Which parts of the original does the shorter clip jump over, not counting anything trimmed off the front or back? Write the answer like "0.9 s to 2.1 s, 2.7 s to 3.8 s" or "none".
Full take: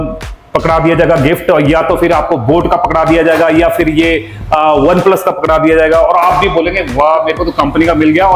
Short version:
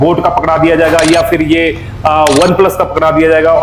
none